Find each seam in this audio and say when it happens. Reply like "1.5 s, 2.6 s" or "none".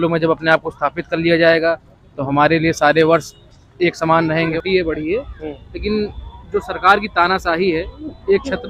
4.5 s